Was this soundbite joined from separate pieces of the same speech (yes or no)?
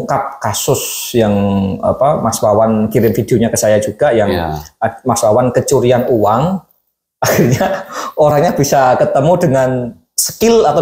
no